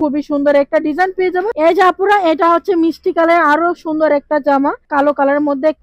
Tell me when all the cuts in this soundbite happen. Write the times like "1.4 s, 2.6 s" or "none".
1.5 s, 4.8 s

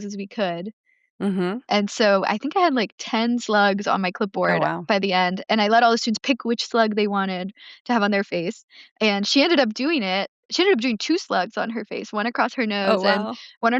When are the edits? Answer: 10.5 s

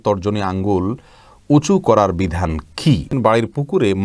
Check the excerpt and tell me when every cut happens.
3.1 s

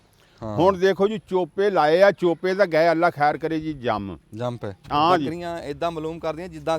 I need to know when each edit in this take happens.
4.7 s

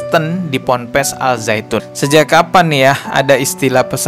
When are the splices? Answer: none

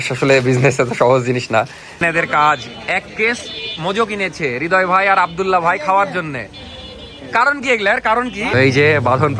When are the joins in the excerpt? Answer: 2.0 s, 8.5 s

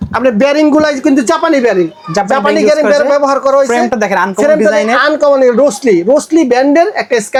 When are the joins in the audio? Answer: none

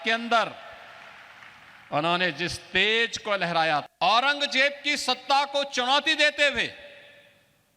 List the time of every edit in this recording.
3.9 s

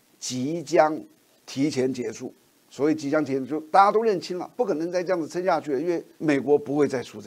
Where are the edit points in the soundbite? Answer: 6.1 s

